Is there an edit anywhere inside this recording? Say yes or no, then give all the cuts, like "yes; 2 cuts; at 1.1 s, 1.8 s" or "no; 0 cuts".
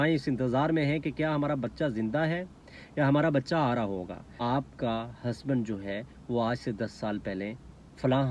yes; 1 cut; at 4.3 s